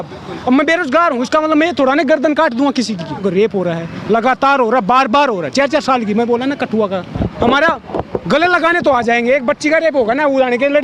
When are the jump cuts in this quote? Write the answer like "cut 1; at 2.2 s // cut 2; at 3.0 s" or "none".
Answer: cut 1; at 3.2 s // cut 2; at 7.1 s